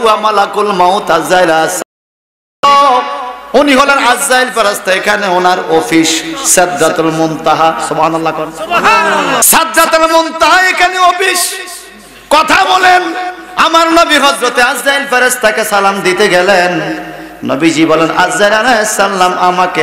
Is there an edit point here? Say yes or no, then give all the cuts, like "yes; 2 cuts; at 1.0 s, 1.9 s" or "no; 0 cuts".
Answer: yes; 1 cut; at 9.4 s